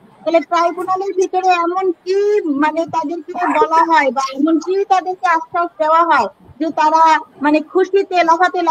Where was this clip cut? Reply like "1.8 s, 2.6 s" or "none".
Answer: none